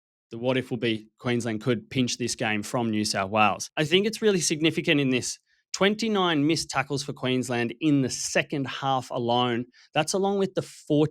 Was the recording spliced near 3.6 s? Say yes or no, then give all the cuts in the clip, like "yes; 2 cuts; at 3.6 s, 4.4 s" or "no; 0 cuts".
yes; 1 cut; at 3.6 s